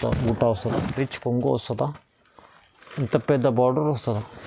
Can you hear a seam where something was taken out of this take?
yes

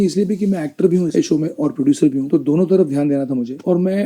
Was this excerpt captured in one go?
no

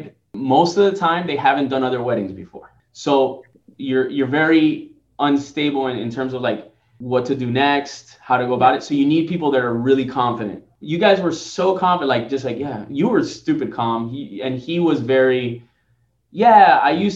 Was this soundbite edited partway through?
no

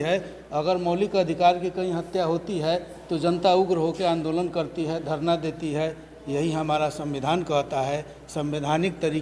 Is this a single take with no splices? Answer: yes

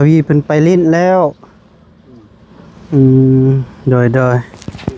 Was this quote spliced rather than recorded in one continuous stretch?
no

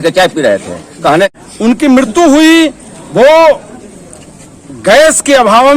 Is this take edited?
yes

